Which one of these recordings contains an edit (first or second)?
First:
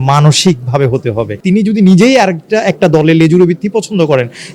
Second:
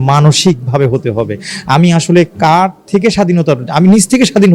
first